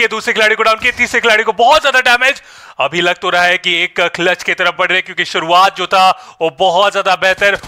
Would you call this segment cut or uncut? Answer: uncut